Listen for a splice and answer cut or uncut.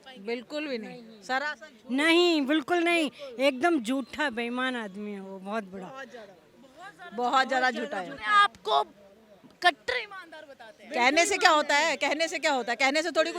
uncut